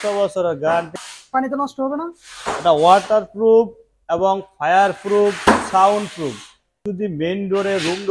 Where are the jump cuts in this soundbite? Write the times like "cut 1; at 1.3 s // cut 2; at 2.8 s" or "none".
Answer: cut 1; at 0.9 s // cut 2; at 6.9 s